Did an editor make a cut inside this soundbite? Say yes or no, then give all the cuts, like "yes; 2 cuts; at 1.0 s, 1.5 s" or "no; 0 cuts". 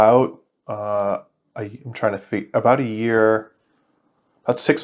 no; 0 cuts